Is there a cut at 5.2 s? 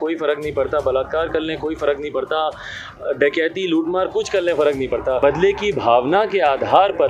yes; 1 cut; at 5.2 s

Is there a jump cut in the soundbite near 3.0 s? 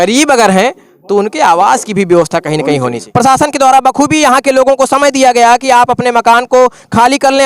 yes; 1 cut; at 3.0 s

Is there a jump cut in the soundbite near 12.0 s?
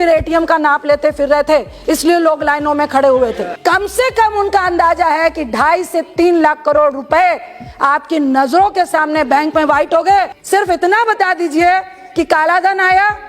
no; 2 cuts; at 3.5 s, 10.4 s

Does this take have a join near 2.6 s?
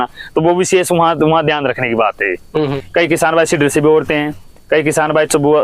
yes; 1 cut; at 2.6 s

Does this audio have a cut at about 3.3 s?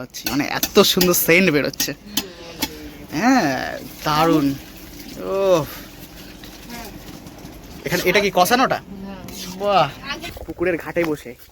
no; 1 cut; at 10.4 s

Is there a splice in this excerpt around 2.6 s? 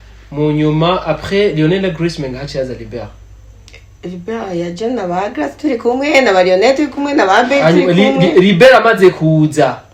no; 0 cuts

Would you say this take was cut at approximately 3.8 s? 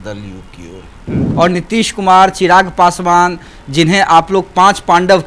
no; 1 cut; at 1.2 s

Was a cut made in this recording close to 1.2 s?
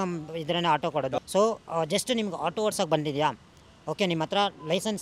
yes; 1 cut; at 1.2 s

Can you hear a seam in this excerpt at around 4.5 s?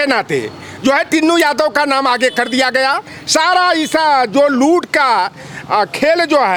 no; 0 cuts

